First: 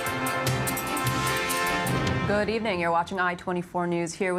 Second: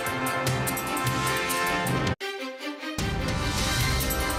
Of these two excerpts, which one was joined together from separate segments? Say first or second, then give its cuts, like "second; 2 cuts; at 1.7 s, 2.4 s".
first; 1 cut; at 2.2 s